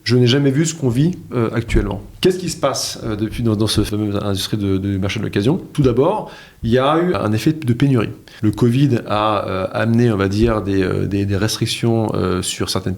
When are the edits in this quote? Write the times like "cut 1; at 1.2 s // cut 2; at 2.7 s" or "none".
cut 1; at 2.0 s // cut 2; at 3.9 s // cut 3; at 5.7 s // cut 4; at 7.2 s // cut 5; at 8.2 s